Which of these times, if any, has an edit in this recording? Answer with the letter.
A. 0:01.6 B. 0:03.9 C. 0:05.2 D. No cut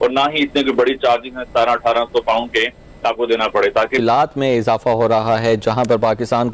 B